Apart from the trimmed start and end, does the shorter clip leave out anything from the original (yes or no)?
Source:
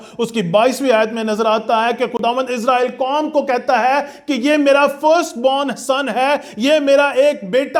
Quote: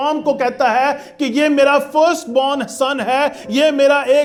no